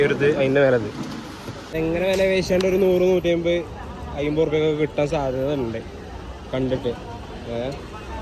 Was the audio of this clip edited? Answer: yes; 1 cut; at 1.6 s

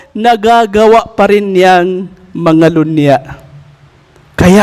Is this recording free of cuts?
yes; 0 cuts

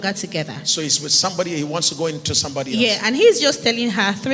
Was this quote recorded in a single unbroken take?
yes; 0 cuts

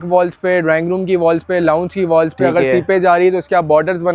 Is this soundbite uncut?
yes; 0 cuts

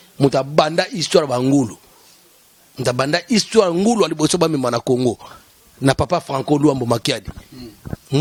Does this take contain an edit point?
no; 0 cuts

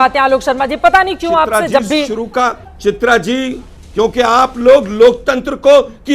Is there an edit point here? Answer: no; 0 cuts

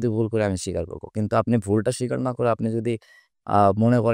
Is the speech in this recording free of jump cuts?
yes; 0 cuts

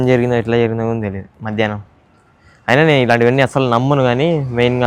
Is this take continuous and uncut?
yes; 0 cuts

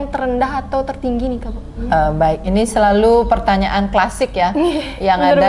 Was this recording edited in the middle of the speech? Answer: yes; 1 cut; at 1.8 s

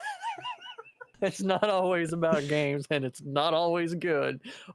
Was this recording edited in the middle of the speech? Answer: yes; 1 cut; at 1.0 s

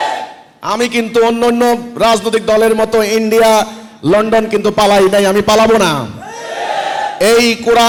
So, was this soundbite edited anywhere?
no; 0 cuts

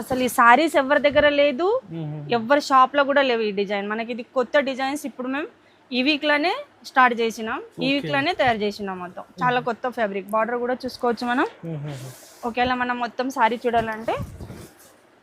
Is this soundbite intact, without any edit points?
yes; 0 cuts

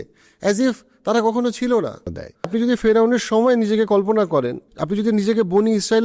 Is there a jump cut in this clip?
yes; 2 cuts; at 2.5 s, 4.7 s

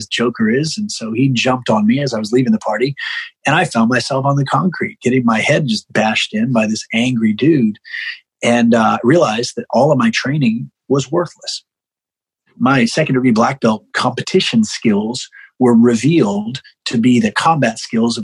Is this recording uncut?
no; 1 cut; at 12.5 s

